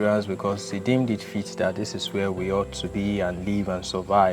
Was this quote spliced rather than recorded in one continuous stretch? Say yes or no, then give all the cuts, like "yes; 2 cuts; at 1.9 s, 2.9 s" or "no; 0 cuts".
no; 0 cuts